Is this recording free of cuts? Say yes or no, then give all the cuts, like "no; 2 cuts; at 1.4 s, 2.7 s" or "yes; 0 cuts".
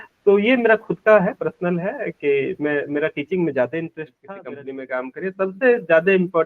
no; 1 cut; at 4.3 s